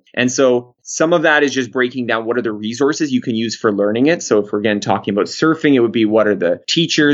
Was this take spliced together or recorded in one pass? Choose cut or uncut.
uncut